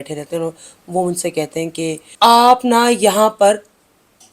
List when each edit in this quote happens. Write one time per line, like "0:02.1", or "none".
0:02.0